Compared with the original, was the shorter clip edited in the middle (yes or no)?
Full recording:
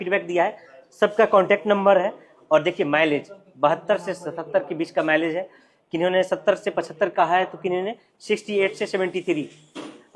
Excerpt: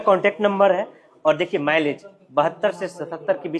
no